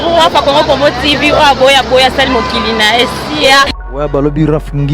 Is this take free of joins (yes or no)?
no